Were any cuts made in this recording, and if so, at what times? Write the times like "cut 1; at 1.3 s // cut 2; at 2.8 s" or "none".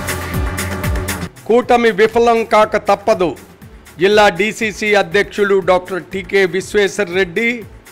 none